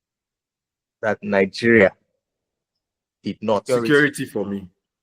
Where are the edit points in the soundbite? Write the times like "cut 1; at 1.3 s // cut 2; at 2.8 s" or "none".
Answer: cut 1; at 3.6 s